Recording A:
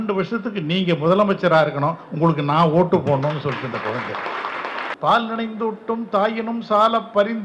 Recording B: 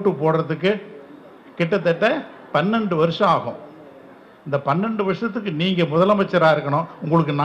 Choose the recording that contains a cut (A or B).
A